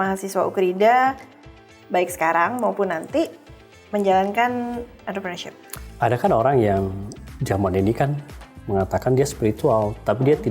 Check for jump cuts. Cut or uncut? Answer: cut